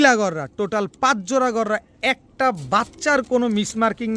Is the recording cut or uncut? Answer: uncut